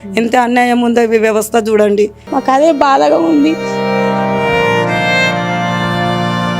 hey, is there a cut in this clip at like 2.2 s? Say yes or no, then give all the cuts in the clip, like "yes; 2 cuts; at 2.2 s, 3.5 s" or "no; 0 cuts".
yes; 1 cut; at 2.2 s